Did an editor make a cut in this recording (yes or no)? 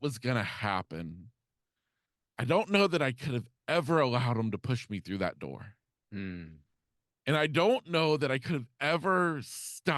no